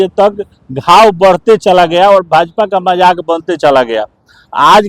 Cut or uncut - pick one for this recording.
uncut